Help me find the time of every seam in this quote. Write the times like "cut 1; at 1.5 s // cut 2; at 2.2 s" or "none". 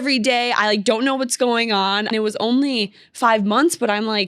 cut 1; at 2.1 s